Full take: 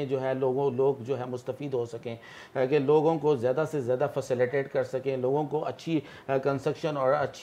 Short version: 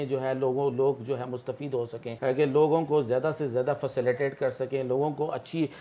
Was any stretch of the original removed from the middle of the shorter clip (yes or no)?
yes